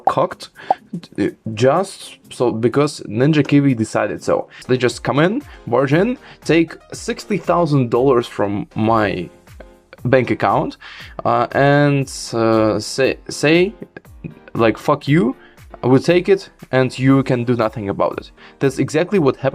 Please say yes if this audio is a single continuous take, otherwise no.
no